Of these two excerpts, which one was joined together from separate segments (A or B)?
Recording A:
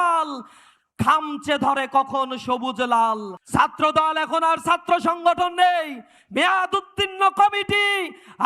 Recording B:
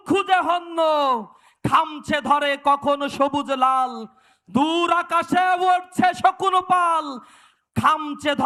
A